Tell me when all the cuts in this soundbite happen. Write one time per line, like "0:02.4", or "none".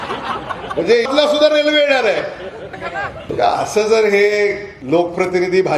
0:01.1
0:03.1
0:04.7

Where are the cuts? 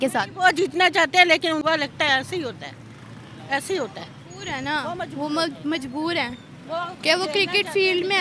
0:01.6

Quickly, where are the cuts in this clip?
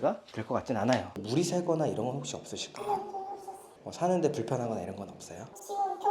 0:01.2

